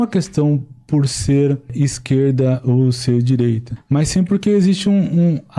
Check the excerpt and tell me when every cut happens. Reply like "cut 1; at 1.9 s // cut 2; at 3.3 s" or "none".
cut 1; at 1.7 s // cut 2; at 3.7 s

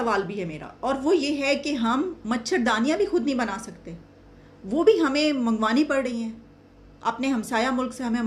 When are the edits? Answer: none

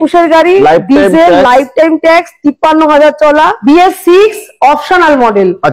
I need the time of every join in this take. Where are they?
cut 1; at 3.6 s

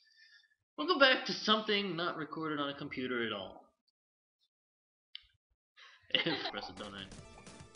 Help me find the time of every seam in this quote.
none

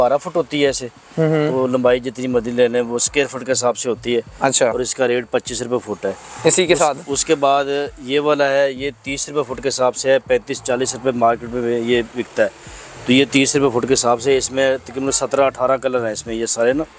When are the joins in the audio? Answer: none

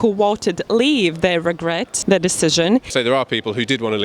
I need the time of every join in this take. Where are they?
cut 1; at 1.9 s // cut 2; at 2.9 s

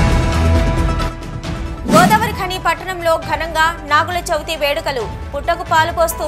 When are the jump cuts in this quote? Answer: cut 1; at 1.6 s

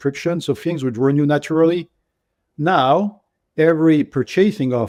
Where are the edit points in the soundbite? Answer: none

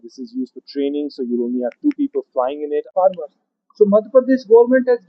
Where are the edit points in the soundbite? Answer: cut 1; at 2.9 s

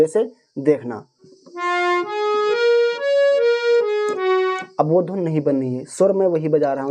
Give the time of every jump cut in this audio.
cut 1; at 1.2 s

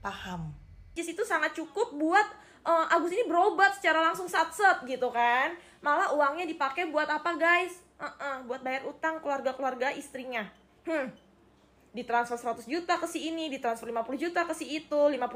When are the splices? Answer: cut 1; at 0.9 s

